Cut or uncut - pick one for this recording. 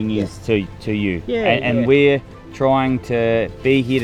uncut